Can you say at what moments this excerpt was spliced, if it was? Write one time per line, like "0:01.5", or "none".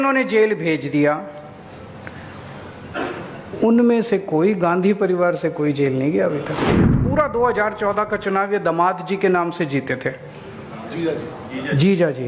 0:06.9

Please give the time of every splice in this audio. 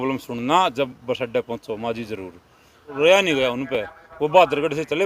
0:02.9

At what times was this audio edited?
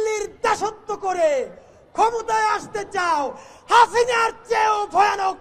none

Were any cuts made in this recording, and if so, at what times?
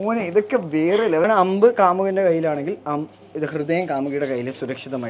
0:01.2

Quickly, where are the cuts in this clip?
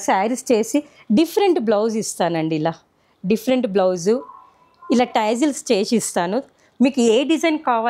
none

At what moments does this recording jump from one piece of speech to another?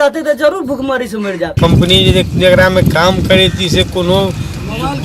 0:01.5

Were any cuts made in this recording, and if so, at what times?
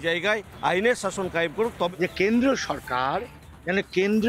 0:01.9

